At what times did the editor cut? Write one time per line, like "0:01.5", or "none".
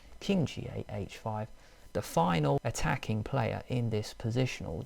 0:02.6